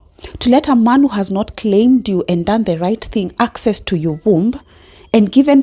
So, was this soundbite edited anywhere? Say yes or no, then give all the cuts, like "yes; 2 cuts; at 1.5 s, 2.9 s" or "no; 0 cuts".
no; 0 cuts